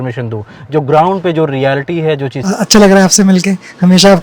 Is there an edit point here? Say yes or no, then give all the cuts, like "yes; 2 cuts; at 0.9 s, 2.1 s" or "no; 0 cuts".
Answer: yes; 1 cut; at 2.3 s